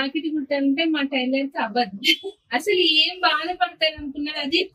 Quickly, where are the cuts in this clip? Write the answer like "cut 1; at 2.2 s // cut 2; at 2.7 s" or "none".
none